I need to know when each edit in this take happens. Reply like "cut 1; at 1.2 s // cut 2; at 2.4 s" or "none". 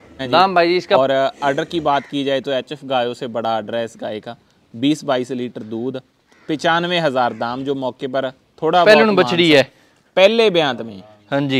cut 1; at 1.0 s // cut 2; at 8.8 s